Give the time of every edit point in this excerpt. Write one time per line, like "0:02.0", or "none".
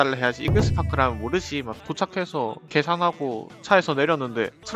0:01.7